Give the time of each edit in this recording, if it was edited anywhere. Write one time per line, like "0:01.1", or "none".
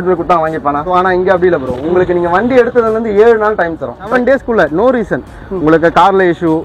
0:00.9
0:04.1